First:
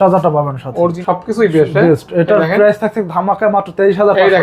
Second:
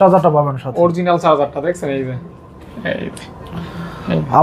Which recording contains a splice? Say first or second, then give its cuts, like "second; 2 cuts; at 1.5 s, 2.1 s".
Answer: first; 1 cut; at 1.0 s